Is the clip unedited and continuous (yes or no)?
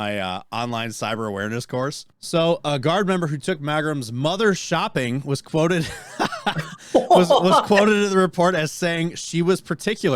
no